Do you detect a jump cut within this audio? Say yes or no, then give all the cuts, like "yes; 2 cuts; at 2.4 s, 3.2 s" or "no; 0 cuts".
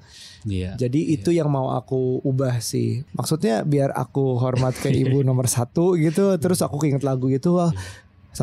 yes; 1 cut; at 3.0 s